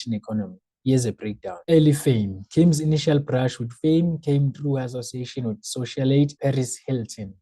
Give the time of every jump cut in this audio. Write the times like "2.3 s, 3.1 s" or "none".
1.6 s